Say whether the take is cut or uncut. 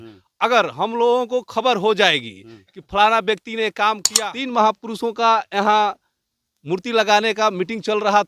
cut